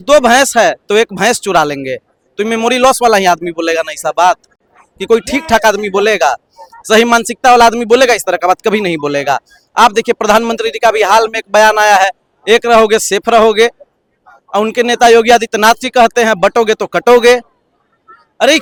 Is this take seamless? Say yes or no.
yes